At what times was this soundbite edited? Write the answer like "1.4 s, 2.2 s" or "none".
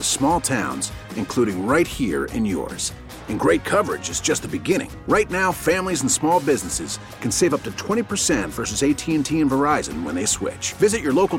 none